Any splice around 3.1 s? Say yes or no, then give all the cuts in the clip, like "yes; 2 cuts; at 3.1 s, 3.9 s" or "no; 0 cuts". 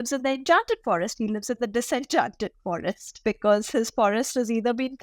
yes; 1 cut; at 3.1 s